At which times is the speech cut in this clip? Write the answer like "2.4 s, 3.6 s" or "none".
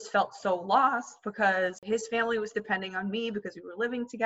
1.8 s